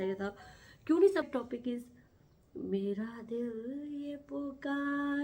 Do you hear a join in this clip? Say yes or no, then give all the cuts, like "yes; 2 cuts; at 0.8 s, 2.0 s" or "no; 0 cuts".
yes; 1 cut; at 1.2 s